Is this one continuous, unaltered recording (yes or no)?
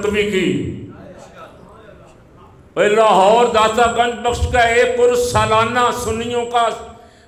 yes